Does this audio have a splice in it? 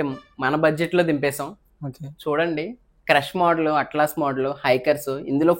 no; 0 cuts

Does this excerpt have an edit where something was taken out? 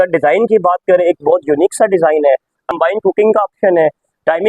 yes; 1 cut; at 2.7 s

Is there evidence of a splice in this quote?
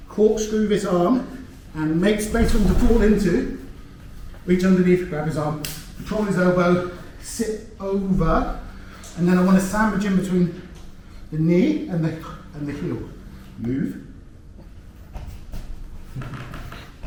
no; 0 cuts

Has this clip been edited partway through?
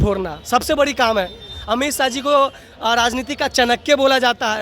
no; 0 cuts

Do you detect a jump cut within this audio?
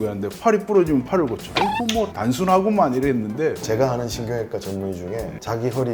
yes; 2 cuts; at 1.2 s, 3.6 s

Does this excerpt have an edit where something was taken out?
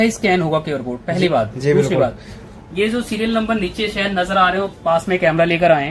no; 0 cuts

